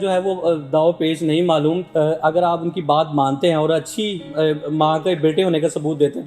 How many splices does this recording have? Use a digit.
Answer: 1